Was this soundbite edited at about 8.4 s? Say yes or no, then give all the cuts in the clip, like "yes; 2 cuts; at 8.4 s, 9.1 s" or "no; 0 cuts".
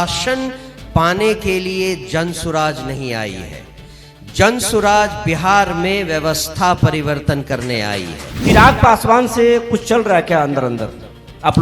yes; 1 cut; at 8.4 s